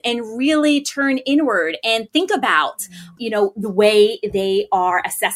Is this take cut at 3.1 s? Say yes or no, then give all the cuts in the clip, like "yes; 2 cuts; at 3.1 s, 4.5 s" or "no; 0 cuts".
yes; 1 cut; at 3.1 s